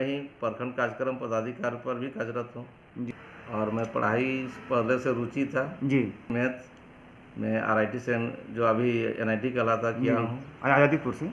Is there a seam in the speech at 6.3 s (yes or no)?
yes